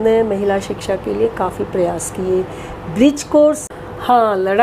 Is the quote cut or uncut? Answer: cut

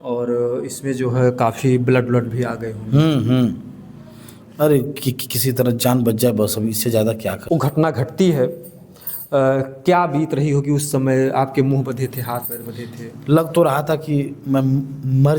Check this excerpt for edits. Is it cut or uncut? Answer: cut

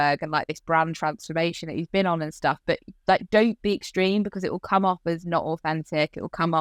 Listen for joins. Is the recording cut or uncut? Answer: uncut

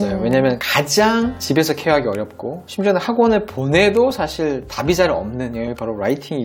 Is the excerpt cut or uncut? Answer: uncut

